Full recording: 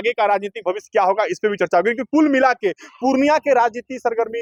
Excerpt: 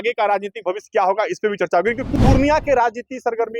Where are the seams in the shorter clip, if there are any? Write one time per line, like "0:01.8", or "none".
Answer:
0:02.0